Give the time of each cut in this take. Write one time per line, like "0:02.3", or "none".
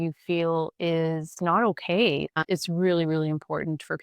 0:02.4